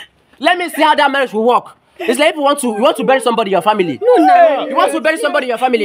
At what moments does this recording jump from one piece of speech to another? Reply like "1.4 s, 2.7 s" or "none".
none